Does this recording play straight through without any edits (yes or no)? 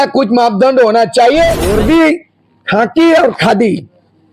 no